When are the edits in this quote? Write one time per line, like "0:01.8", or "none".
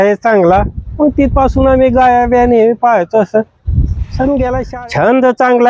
0:04.7